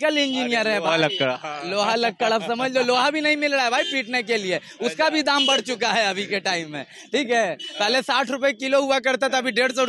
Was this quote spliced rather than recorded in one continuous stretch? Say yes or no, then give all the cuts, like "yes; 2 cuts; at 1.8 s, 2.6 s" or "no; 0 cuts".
no; 0 cuts